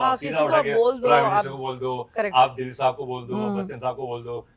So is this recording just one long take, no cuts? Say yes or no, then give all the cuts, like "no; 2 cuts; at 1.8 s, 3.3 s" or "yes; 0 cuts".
yes; 0 cuts